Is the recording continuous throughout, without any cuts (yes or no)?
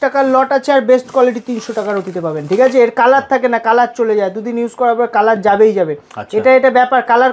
yes